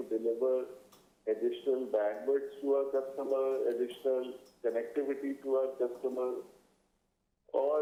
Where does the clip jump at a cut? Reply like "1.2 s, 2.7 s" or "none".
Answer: none